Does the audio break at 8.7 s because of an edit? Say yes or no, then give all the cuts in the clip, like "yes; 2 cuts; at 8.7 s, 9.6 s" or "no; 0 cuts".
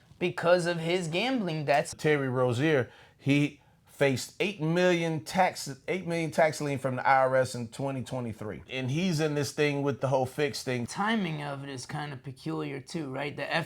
yes; 4 cuts; at 1.9 s, 8.7 s, 10.0 s, 10.9 s